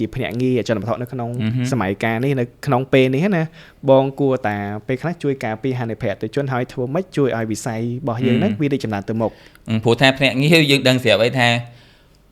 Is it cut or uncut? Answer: uncut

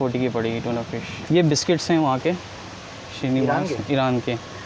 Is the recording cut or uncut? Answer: cut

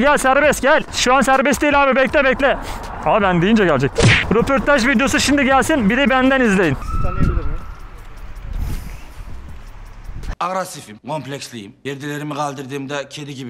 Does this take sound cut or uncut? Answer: cut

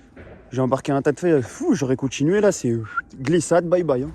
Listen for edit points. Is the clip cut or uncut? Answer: uncut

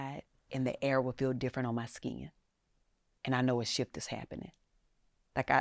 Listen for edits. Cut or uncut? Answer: uncut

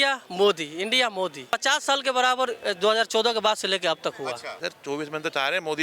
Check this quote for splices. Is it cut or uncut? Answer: cut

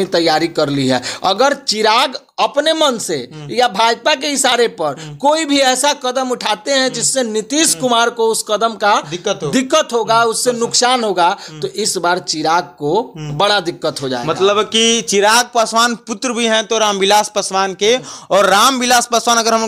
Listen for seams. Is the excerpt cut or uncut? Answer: uncut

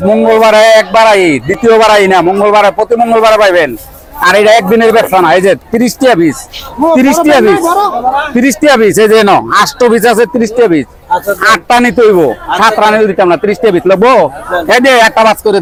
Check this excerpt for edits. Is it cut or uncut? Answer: uncut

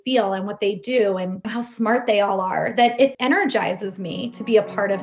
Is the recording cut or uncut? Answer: cut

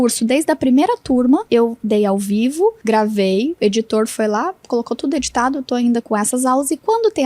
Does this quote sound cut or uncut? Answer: cut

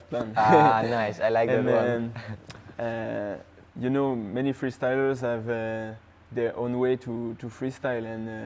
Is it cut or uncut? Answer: uncut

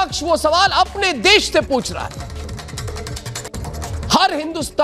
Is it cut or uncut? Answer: uncut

